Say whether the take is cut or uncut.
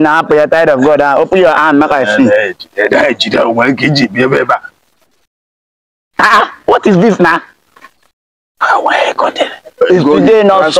cut